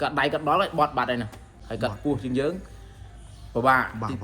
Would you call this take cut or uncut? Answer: cut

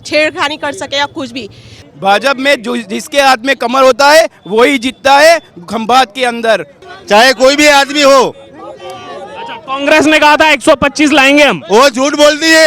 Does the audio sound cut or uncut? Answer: cut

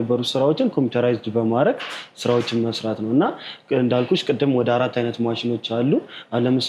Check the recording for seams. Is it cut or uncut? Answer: uncut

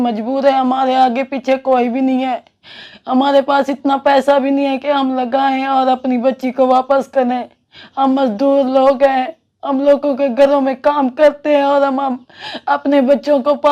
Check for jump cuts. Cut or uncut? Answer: uncut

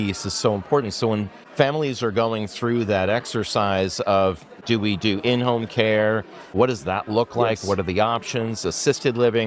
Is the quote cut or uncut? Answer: cut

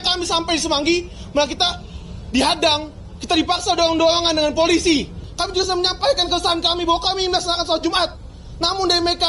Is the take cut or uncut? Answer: cut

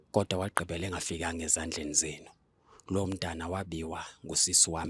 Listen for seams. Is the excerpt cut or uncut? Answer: uncut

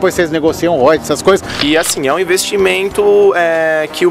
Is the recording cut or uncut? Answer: cut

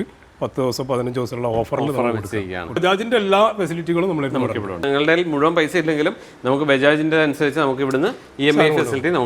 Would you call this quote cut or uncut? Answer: cut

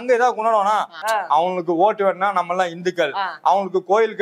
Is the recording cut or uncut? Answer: cut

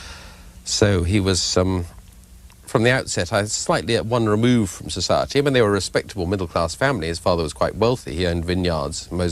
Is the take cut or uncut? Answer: cut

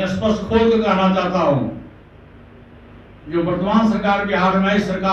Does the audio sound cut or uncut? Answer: uncut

